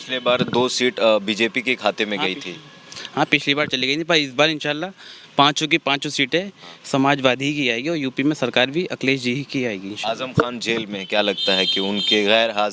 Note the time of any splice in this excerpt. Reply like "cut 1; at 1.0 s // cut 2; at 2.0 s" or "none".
none